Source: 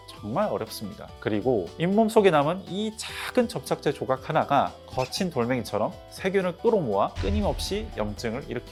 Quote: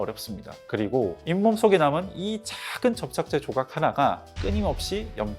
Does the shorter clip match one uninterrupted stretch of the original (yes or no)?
no